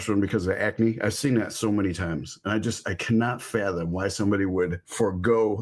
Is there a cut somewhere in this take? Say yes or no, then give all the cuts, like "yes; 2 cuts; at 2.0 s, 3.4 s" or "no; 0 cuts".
no; 0 cuts